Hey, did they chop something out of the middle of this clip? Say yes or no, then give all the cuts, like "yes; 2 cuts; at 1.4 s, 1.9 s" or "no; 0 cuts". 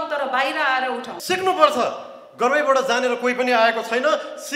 yes; 1 cut; at 1.1 s